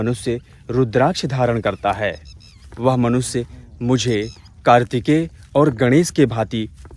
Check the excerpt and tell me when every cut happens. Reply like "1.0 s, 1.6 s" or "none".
none

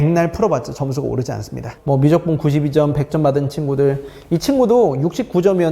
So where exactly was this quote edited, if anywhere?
1.7 s

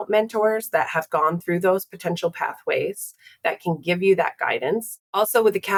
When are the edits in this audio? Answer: none

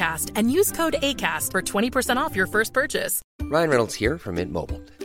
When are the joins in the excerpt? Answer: 3.2 s

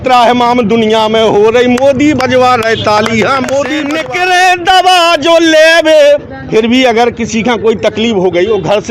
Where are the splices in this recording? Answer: 4.0 s

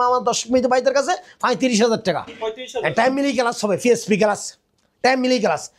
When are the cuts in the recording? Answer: none

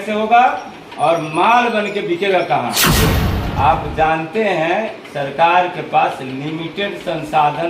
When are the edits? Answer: 3.0 s

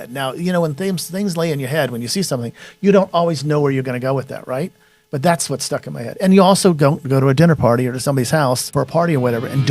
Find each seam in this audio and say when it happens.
8.7 s

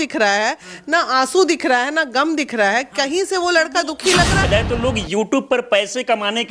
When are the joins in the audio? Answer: 4.5 s

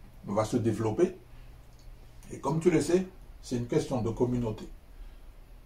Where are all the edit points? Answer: none

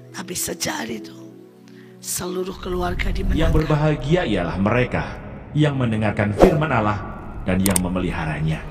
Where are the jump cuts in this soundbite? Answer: 3.3 s

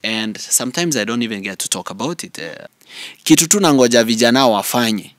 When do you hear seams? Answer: 2.6 s

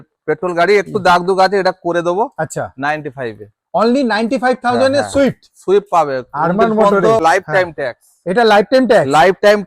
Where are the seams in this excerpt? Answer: 7.2 s

